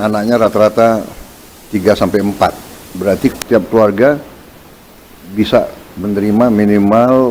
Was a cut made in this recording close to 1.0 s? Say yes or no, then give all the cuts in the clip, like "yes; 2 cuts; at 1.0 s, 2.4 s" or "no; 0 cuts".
no; 0 cuts